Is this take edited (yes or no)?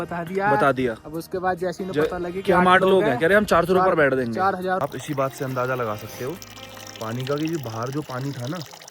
yes